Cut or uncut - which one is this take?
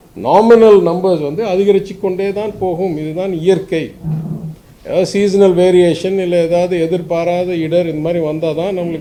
uncut